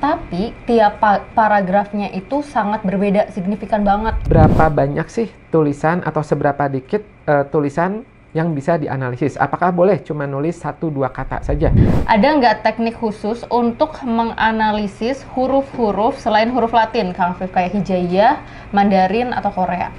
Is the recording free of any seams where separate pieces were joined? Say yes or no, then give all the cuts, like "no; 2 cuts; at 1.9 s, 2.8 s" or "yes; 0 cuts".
no; 2 cuts; at 4.2 s, 11.9 s